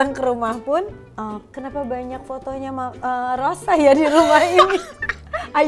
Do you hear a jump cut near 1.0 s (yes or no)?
yes